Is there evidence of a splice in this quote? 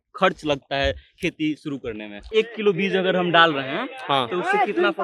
yes; 1 cut; at 2.3 s

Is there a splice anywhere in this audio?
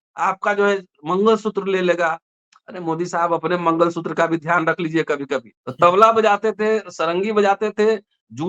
yes; 1 cut; at 5.6 s

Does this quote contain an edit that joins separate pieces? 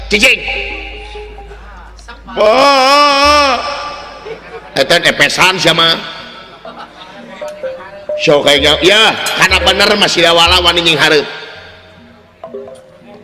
no; 0 cuts

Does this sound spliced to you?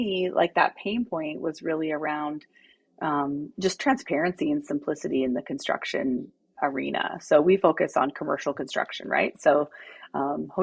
no; 0 cuts

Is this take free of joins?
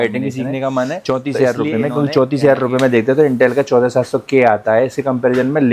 no; 1 cut; at 1.0 s

